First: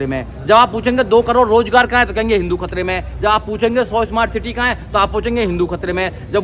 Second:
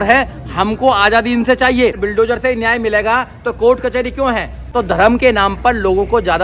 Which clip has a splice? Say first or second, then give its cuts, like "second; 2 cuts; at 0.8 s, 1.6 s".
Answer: second; 2 cuts; at 2.0 s, 4.6 s